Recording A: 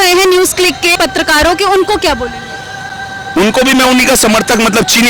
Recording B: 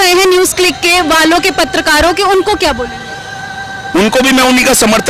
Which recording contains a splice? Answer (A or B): A